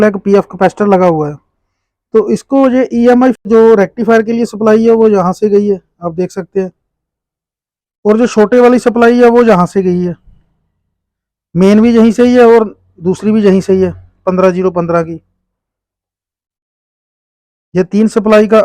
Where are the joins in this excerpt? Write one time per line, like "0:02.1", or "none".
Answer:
0:03.4

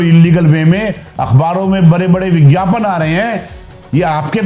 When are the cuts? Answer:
none

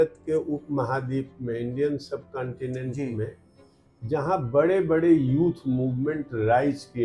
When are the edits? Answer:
none

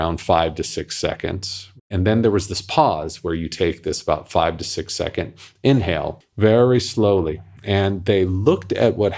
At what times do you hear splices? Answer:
0:01.8
0:06.2

